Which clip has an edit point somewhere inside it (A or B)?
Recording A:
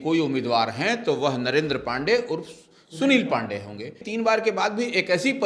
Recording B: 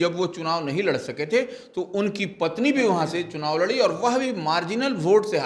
A